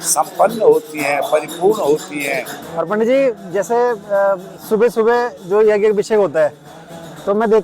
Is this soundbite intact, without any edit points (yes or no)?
yes